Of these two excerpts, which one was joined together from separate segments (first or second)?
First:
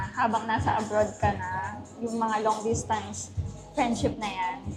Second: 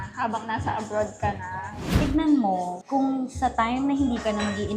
second